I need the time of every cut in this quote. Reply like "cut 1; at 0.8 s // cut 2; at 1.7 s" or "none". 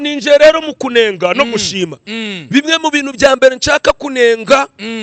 none

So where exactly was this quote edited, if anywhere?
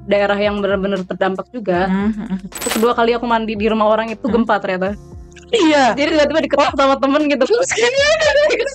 cut 1; at 2.6 s

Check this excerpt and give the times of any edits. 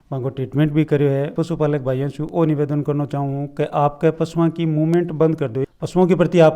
cut 1; at 1.3 s // cut 2; at 5.6 s

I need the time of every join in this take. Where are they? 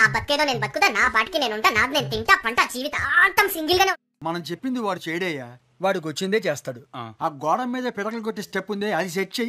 cut 1; at 4.2 s

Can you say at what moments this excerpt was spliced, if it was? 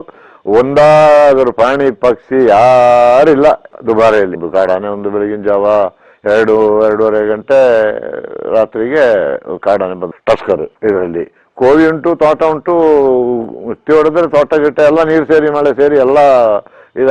cut 1; at 4.4 s // cut 2; at 10.7 s

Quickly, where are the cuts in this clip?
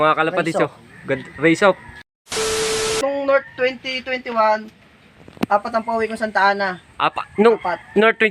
cut 1; at 2.0 s // cut 2; at 3.0 s

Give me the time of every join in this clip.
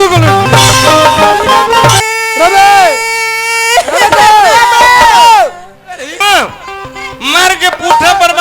cut 1; at 2.0 s // cut 2; at 6.2 s

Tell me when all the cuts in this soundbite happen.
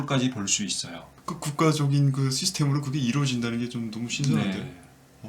cut 1; at 1.1 s

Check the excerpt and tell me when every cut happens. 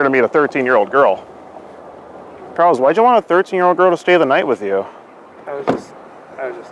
cut 1; at 2.5 s

